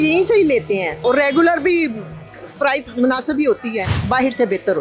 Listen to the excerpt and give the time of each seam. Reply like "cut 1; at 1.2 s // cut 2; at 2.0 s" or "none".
cut 1; at 1.0 s // cut 2; at 3.9 s